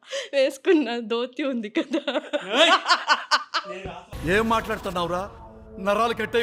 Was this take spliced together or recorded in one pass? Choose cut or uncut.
uncut